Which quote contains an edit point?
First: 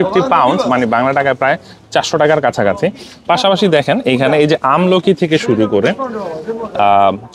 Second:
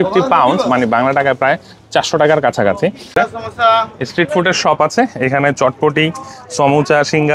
second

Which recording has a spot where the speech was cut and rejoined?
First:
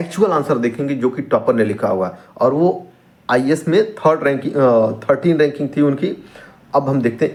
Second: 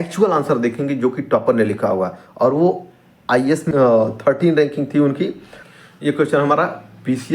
second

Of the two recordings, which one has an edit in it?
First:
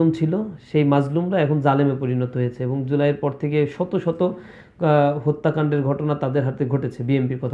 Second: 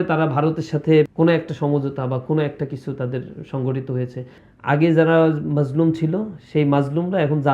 second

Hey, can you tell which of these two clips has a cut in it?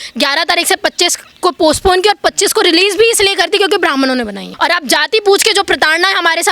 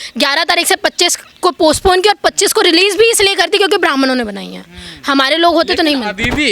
first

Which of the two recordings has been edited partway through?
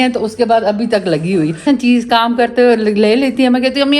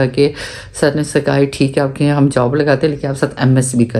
first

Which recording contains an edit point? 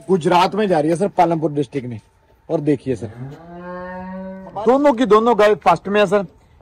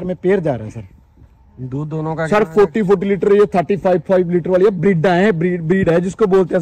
first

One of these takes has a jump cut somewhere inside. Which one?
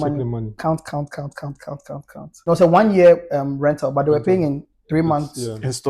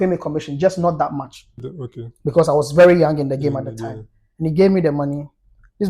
first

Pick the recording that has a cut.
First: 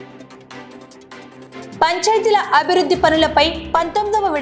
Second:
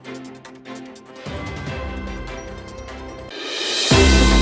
first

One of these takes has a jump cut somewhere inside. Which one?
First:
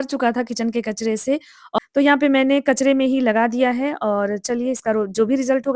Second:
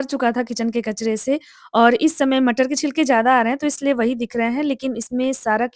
first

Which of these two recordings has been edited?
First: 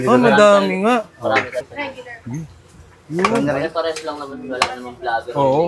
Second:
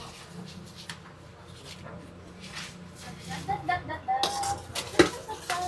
first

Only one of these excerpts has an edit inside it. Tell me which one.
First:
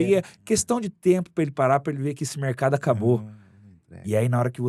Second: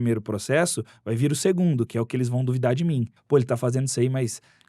second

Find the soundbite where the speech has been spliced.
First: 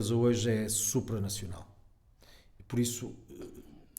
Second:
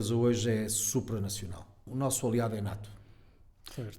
second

